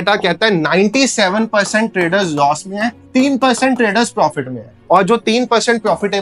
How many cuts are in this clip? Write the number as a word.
zero